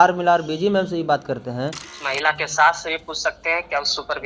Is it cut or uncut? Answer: cut